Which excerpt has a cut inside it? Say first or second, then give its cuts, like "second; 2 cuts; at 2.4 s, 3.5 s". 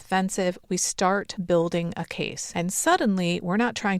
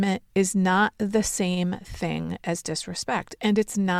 first; 2 cuts; at 1.3 s, 2.4 s